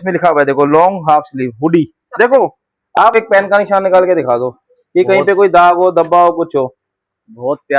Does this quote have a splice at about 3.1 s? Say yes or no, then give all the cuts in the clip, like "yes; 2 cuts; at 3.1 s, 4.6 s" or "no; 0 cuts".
yes; 1 cut; at 3.1 s